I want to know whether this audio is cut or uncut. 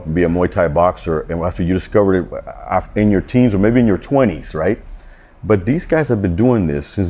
uncut